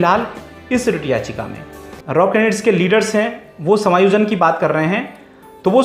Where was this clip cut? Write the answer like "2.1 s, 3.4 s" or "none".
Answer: 2.0 s